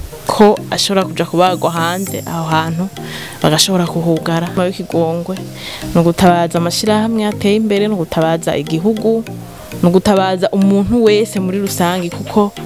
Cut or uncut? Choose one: cut